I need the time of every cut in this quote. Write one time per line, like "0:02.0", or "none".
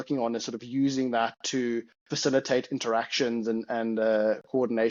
none